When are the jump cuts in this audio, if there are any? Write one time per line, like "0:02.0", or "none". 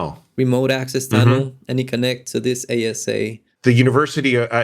0:03.5